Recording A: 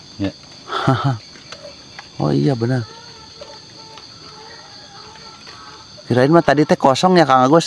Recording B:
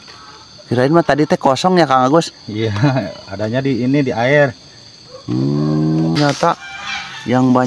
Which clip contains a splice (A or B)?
B